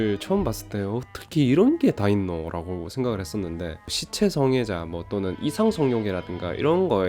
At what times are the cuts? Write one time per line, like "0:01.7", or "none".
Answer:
none